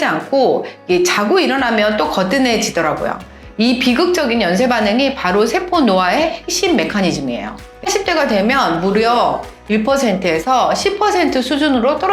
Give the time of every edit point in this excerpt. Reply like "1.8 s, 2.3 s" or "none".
3.4 s, 7.6 s